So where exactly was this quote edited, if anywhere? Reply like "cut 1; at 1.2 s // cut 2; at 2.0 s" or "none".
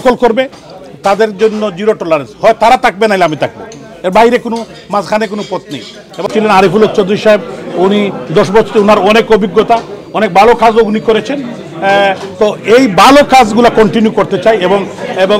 cut 1; at 6.3 s